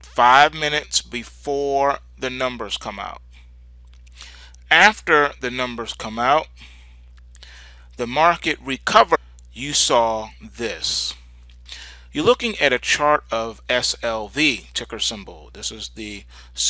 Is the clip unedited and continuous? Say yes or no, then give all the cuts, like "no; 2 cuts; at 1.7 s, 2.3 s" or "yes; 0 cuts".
yes; 0 cuts